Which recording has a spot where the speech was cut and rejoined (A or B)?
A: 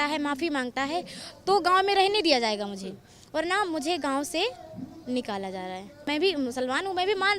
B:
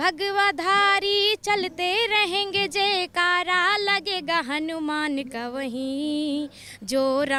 A